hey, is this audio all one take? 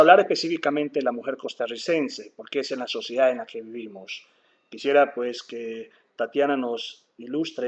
no; 1 cut; at 3.0 s

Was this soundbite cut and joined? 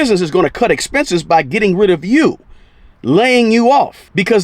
no; 0 cuts

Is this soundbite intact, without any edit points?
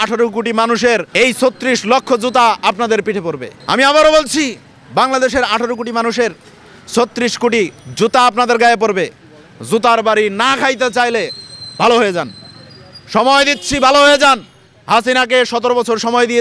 no; 2 cuts; at 1.1 s, 3.5 s

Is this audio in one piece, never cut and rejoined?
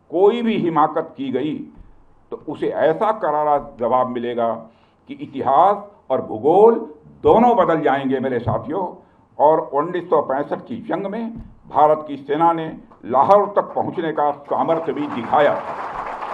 yes; 0 cuts

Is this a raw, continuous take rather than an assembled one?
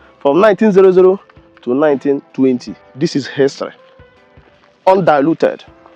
yes; 0 cuts

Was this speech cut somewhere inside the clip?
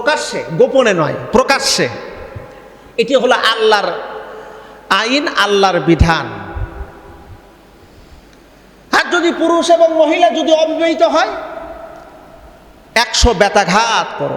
no; 0 cuts

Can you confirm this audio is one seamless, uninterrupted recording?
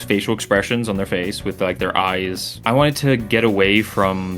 no; 1 cut; at 2.5 s

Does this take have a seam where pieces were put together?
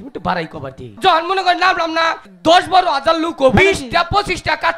yes; 3 cuts; at 1.0 s, 2.2 s, 3.6 s

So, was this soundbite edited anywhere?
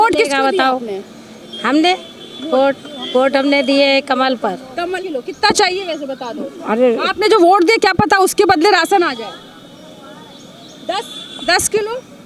yes; 1 cut; at 5.0 s

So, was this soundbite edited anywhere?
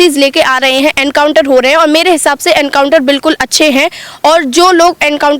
no; 0 cuts

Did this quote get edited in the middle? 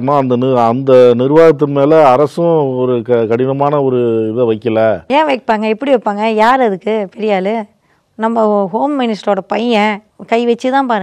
yes; 1 cut; at 10.1 s

